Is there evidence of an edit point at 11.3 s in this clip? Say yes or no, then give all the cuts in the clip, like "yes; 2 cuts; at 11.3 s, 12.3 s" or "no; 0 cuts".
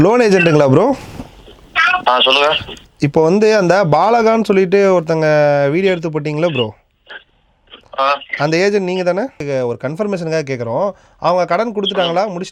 no; 0 cuts